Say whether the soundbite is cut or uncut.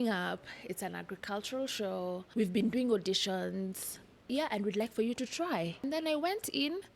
cut